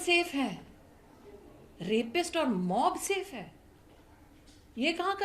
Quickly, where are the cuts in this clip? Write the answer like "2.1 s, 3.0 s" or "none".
none